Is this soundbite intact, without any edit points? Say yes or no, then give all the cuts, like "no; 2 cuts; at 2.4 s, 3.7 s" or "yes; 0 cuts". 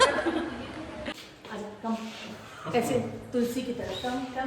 no; 1 cut; at 1.1 s